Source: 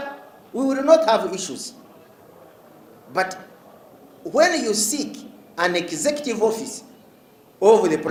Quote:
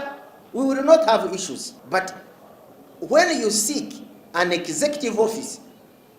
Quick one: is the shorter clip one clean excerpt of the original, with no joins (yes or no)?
no